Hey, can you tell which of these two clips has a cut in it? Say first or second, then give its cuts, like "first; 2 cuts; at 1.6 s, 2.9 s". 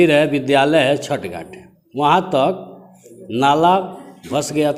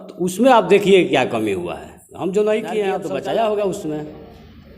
second; 1 cut; at 3.0 s